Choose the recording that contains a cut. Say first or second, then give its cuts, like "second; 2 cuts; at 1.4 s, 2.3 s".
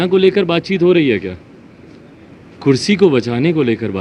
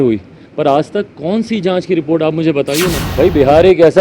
second; 1 cut; at 3.0 s